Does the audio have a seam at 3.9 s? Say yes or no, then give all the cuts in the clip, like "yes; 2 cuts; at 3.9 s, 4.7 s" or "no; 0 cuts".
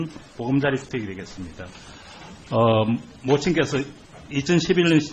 no; 1 cut; at 1.8 s